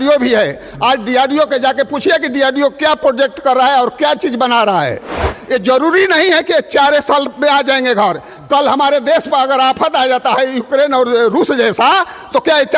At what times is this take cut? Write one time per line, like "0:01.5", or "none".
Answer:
0:05.3